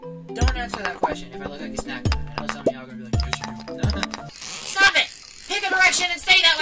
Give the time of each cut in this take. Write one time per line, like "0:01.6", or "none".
0:04.3